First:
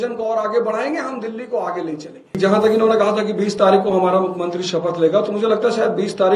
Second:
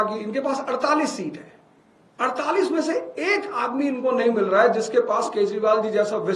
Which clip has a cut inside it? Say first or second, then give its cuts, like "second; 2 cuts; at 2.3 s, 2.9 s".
first; 1 cut; at 2.4 s